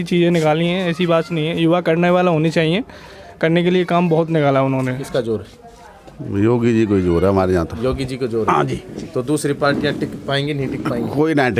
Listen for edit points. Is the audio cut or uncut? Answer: cut